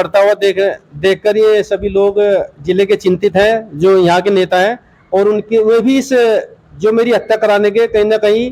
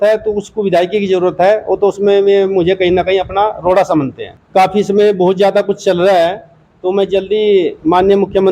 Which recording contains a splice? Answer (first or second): second